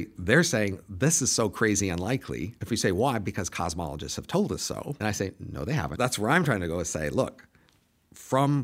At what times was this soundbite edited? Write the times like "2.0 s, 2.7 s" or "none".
2.5 s, 5.0 s, 5.9 s